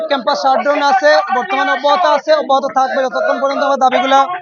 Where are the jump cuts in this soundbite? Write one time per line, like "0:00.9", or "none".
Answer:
none